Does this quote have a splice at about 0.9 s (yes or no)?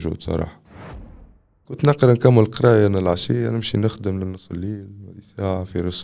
yes